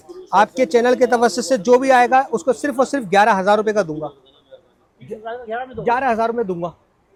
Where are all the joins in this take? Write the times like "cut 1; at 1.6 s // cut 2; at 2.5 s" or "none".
none